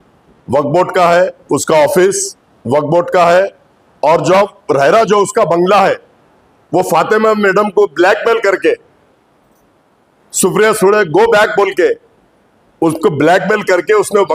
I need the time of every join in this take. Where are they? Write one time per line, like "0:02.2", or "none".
none